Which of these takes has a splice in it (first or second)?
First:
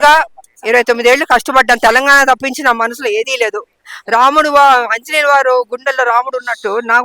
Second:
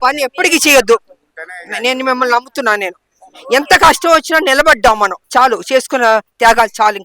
second